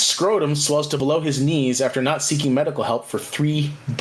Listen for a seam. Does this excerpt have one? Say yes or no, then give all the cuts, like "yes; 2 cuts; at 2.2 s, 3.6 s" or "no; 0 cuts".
yes; 1 cut; at 1.0 s